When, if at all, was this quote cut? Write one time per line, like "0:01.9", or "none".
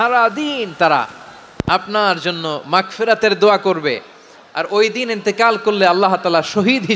none